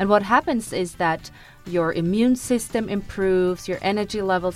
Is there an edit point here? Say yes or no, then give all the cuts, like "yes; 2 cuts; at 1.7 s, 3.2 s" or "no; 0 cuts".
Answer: no; 0 cuts